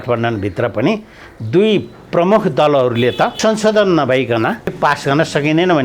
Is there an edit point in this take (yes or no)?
yes